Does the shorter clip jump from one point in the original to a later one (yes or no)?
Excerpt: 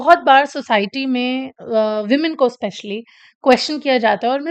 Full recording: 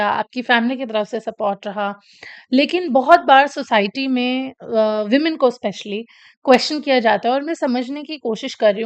no